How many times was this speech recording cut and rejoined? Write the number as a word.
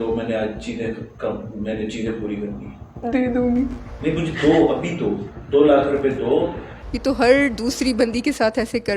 one